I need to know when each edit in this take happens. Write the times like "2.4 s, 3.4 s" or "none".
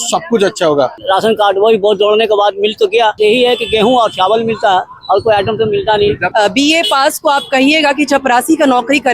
1.0 s, 3.2 s, 6.2 s